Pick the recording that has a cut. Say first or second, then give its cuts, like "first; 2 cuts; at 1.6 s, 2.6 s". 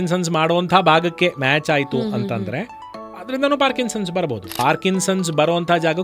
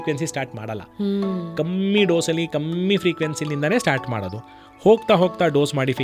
first; 1 cut; at 4.5 s